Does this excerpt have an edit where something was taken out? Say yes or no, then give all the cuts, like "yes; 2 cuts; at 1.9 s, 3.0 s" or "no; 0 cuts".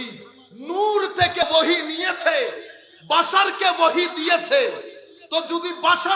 yes; 1 cut; at 1.4 s